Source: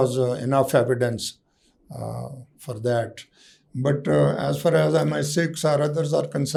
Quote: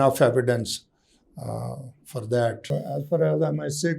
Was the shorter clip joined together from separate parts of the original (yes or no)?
yes